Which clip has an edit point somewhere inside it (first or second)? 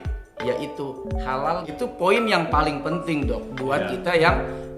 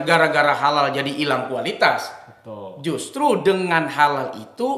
first